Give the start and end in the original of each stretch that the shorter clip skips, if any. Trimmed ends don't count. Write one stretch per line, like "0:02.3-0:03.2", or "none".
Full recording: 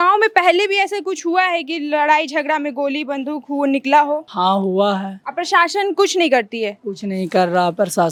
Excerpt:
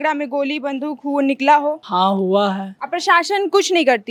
none